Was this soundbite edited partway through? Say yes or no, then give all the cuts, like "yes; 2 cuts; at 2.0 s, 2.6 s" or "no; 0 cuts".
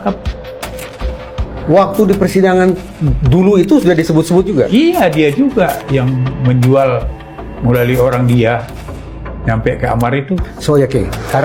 no; 0 cuts